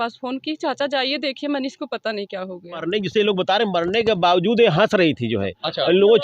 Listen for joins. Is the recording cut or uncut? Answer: cut